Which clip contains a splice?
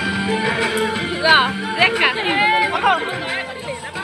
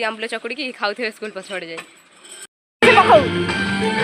second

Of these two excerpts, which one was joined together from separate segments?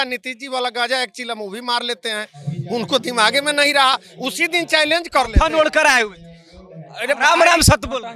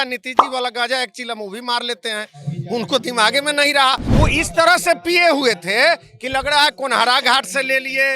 second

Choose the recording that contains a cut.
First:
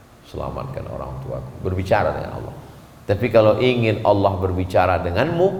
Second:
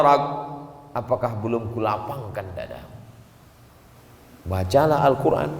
second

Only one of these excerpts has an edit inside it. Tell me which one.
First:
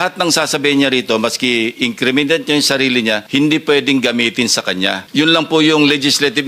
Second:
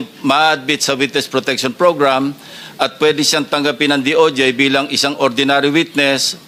first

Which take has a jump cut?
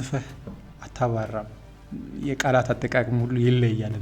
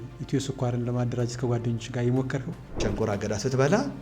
second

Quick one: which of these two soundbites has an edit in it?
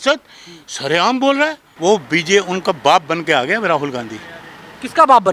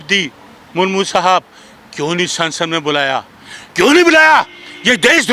first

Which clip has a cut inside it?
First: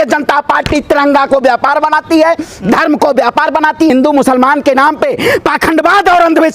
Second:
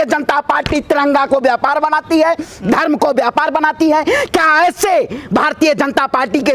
first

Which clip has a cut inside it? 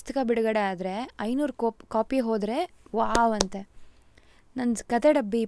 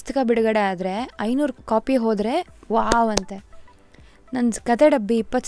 second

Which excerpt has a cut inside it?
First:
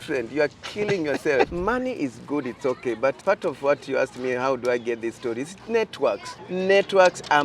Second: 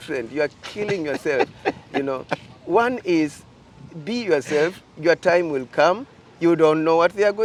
first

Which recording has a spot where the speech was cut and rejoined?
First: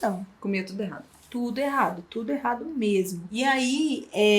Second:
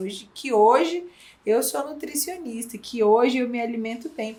first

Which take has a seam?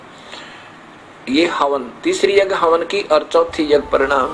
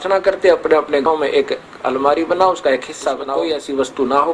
second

